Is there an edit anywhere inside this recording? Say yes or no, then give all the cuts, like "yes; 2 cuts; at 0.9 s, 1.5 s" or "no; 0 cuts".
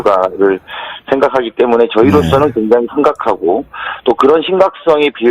yes; 1 cut; at 3.4 s